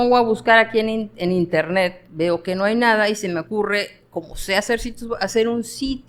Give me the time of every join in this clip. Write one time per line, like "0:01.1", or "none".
none